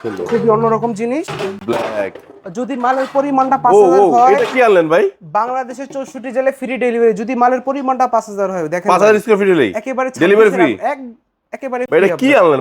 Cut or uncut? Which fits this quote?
uncut